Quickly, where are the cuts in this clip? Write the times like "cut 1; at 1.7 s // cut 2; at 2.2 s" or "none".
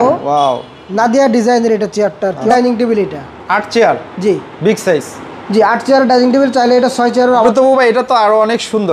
cut 1; at 2.4 s // cut 2; at 7.5 s